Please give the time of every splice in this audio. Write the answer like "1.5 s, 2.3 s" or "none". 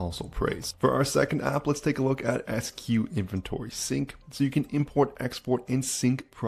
none